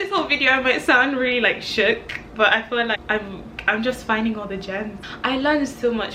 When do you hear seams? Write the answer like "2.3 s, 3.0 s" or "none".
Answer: 3.0 s, 5.0 s